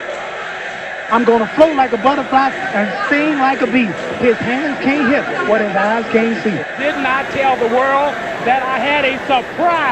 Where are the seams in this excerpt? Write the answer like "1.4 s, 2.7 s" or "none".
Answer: none